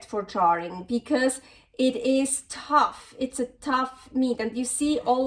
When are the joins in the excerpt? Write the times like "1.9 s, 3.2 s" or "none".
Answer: none